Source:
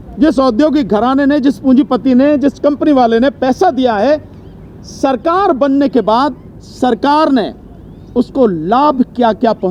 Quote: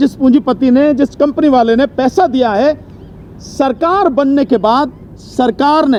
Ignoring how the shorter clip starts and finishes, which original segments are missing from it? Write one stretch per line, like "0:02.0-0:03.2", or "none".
none